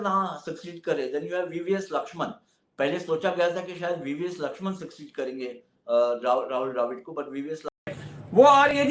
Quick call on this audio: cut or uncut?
cut